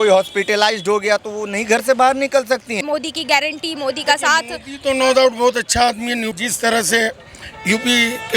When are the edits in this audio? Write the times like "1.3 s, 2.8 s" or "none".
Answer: 2.8 s, 6.3 s